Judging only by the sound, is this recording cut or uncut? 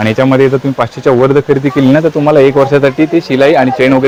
uncut